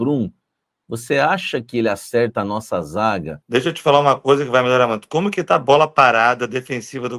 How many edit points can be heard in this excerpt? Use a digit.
1